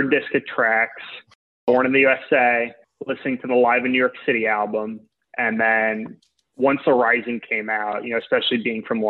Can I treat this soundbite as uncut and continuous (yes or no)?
no